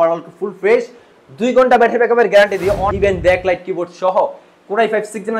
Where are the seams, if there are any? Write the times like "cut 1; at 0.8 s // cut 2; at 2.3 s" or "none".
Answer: cut 1; at 2.9 s